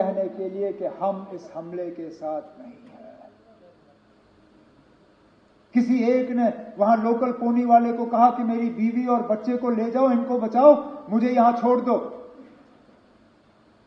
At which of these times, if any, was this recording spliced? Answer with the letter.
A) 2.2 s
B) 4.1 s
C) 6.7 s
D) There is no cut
B